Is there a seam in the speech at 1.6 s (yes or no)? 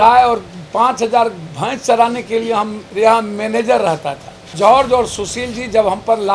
no